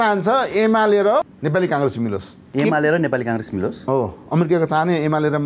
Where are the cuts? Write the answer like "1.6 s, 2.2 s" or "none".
1.3 s, 2.3 s